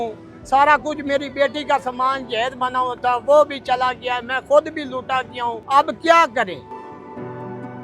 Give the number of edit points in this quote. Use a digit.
1